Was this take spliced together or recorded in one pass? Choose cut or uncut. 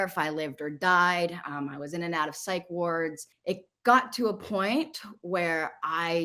cut